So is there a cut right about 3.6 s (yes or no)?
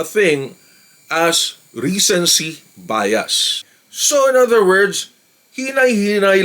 yes